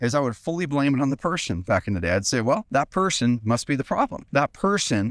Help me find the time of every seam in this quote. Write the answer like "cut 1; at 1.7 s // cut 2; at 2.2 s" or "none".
cut 1; at 2.7 s // cut 2; at 4.2 s